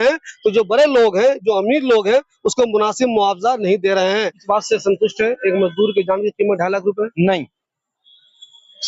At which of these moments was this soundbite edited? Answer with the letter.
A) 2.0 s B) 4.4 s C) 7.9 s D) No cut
B